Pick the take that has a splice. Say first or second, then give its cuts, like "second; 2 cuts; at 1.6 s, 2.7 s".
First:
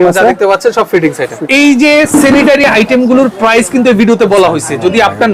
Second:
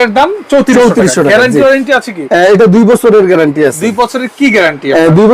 first; 2 cuts; at 1.3 s, 2.6 s